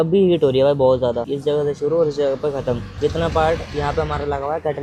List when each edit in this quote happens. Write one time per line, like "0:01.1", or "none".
none

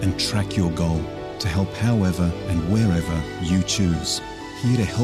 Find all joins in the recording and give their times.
0:02.4

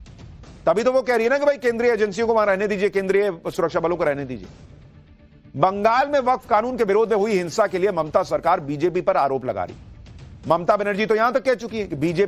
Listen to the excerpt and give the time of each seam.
0:06.2

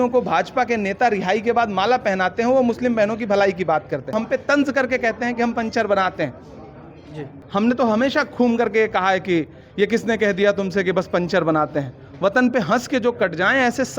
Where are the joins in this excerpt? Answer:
0:04.1
0:07.4

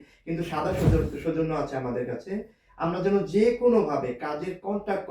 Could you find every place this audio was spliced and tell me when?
none

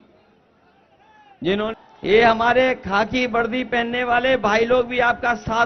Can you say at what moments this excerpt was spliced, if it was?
0:01.7

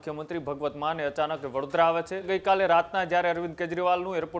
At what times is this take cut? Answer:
0:02.3

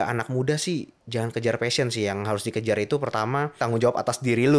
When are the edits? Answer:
0:01.0
0:03.6

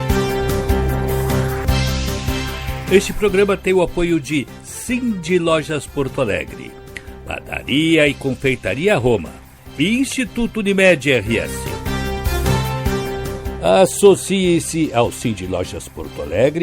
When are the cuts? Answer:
0:00.9
0:02.8
0:11.5
0:13.4

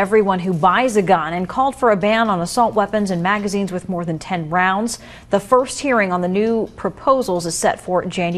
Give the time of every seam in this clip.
0:01.3

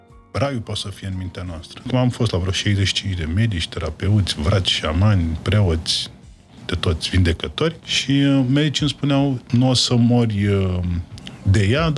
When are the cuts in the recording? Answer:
0:01.8
0:07.9
0:09.4

